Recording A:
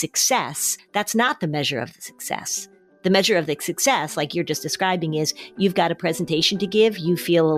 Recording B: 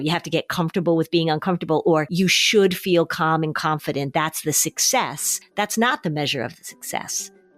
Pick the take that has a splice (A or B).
B